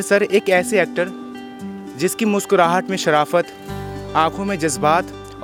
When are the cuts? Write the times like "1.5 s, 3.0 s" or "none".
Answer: none